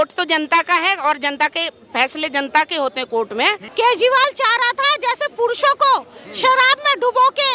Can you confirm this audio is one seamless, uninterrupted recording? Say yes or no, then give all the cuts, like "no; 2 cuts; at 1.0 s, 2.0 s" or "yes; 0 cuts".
no; 1 cut; at 3.6 s